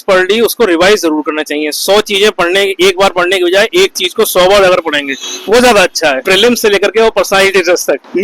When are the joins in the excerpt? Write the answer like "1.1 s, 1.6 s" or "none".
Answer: 6.3 s